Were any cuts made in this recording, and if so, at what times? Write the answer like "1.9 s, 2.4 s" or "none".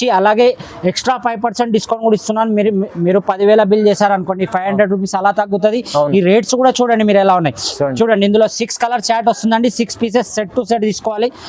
none